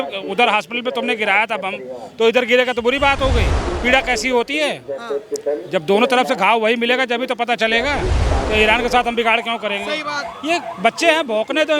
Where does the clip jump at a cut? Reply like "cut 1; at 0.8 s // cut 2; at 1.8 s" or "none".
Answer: cut 1; at 3.6 s // cut 2; at 8.2 s